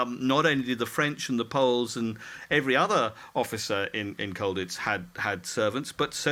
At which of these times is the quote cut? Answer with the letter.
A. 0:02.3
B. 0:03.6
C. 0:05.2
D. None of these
D